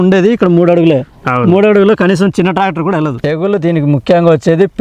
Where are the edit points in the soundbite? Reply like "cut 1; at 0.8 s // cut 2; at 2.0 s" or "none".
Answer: cut 1; at 3.2 s